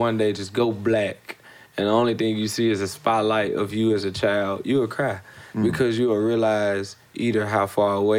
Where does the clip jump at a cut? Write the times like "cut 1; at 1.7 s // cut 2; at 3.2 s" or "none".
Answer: none